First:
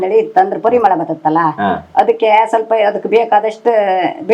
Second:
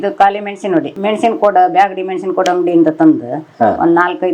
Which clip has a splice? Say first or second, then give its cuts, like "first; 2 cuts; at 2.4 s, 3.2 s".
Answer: second; 1 cut; at 1.0 s